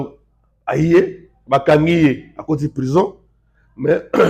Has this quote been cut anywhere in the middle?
no; 0 cuts

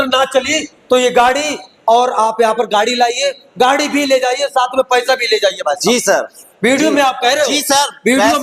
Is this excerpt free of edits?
yes; 0 cuts

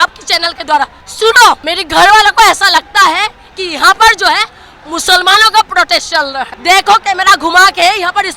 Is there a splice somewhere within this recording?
yes; 3 cuts; at 1.0 s, 1.7 s, 6.5 s

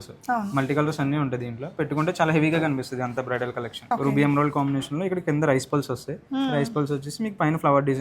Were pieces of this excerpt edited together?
yes; 1 cut; at 3.8 s

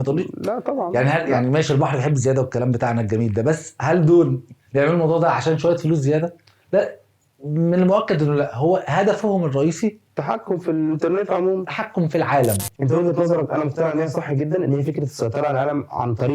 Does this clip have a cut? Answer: yes; 1 cut; at 12.7 s

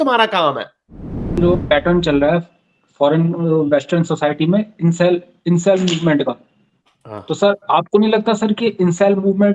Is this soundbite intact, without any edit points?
no; 1 cut; at 1.4 s

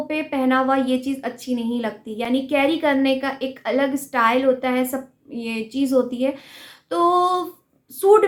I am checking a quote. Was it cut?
no; 0 cuts

